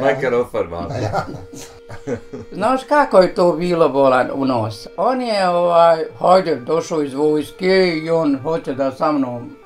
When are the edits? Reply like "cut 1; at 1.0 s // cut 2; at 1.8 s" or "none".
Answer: cut 1; at 1.7 s